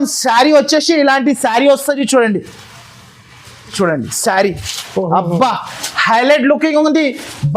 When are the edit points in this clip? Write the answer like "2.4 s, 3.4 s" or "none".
3.7 s